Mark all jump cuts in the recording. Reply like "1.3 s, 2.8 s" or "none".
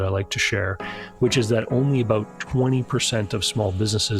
none